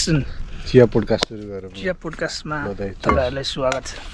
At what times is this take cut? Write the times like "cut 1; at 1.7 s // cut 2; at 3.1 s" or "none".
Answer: none